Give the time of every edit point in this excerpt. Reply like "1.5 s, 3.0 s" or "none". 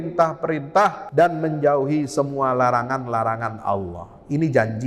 1.0 s